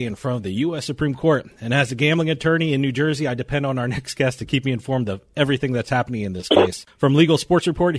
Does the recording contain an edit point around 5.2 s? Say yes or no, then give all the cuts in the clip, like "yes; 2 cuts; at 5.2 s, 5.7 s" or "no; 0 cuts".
no; 1 cut; at 6.8 s